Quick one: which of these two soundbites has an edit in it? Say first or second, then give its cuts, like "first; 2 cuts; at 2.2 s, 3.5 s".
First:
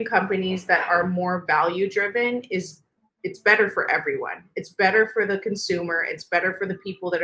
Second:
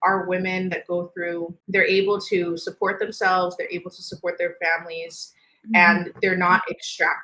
second; 1 cut; at 1.6 s